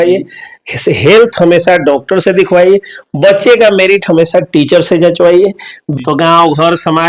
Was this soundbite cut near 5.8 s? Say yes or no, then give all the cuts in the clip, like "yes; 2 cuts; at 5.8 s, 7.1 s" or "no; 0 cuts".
yes; 1 cut; at 5.8 s